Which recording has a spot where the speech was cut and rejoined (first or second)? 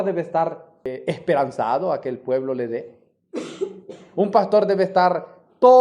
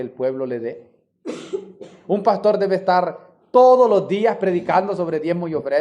first